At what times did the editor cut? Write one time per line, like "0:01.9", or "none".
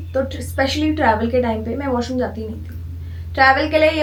none

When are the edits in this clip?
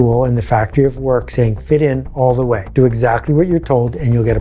0:02.7

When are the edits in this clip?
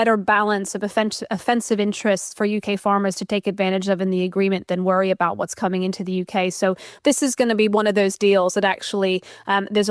none

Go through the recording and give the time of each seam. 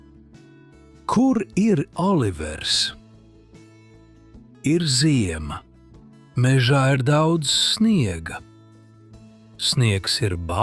0:01.0

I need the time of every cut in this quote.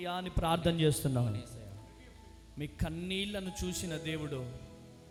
none

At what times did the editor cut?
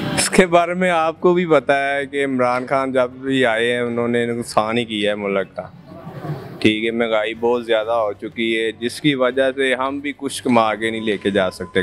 none

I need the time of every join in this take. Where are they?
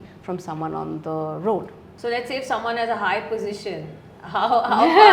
0:01.8

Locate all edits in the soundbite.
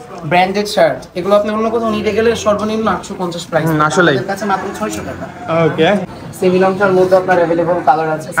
0:06.0

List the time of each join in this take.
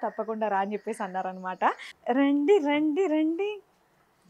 0:01.9

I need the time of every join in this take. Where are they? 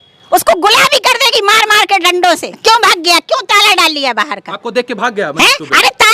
0:02.5

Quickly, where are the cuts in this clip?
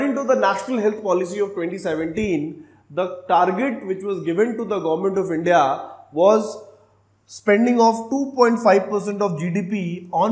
none

